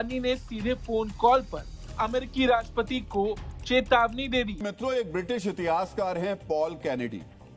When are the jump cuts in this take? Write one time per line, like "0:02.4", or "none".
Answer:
0:04.6